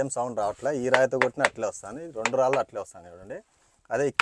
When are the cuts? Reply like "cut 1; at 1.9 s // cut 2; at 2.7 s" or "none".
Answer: none

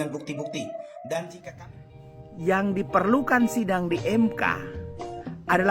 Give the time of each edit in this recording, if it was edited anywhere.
cut 1; at 1.3 s

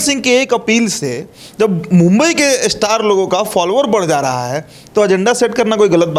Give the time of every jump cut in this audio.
none

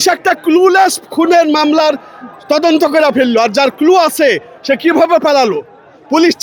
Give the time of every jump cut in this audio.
none

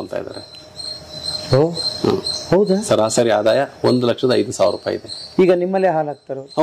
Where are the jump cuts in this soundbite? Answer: none

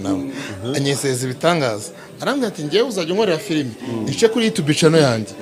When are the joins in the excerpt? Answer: none

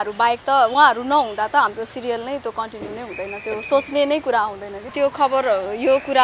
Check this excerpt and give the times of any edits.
cut 1; at 4.9 s

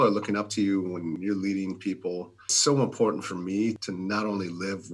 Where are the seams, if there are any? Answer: cut 1; at 1.2 s // cut 2; at 2.5 s // cut 3; at 3.8 s

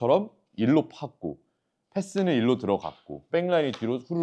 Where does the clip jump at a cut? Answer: cut 1; at 3.2 s

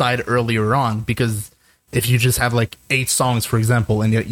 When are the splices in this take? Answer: none

